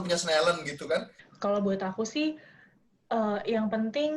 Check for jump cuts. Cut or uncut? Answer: cut